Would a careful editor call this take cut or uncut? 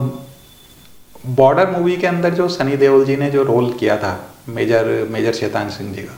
uncut